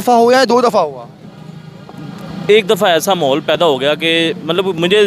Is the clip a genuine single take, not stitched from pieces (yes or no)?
yes